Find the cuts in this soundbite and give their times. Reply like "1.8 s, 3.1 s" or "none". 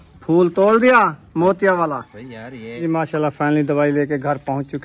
2.7 s